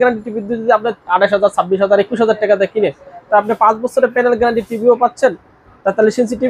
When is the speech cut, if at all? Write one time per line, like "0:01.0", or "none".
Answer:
none